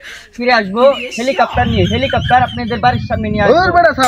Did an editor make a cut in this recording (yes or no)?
no